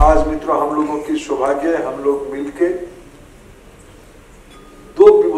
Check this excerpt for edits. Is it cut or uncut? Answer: uncut